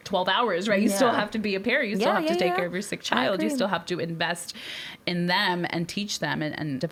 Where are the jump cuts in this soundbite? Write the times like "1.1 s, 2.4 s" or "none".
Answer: none